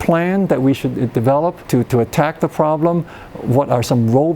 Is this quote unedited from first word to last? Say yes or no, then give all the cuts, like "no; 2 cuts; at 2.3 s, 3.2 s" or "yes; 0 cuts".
no; 1 cut; at 1.6 s